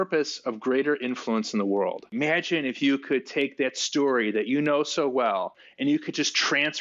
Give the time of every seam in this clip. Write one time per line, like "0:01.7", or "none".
0:02.1
0:05.6